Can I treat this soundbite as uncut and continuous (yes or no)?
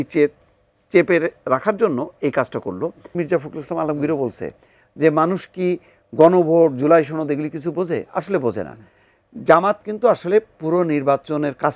no